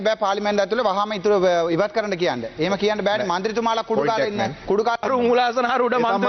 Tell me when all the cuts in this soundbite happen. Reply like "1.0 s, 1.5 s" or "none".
5.0 s